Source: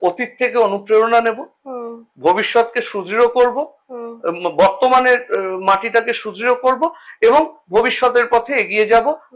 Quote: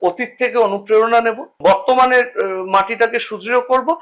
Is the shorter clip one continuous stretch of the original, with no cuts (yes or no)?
no